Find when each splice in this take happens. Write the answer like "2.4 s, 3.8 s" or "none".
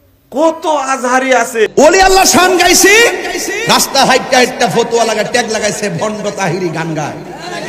1.7 s

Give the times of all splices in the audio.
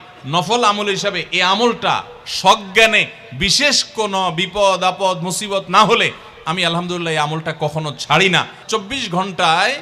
8.6 s

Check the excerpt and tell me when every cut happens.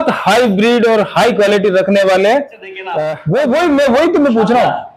3.0 s

